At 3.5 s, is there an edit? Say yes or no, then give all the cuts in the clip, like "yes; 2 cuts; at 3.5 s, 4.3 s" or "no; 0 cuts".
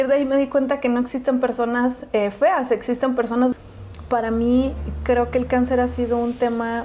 yes; 1 cut; at 3.5 s